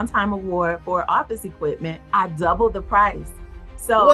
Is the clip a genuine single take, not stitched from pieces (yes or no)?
no